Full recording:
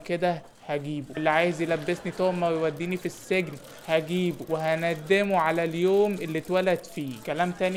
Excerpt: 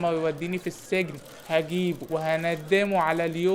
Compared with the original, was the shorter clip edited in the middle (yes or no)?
no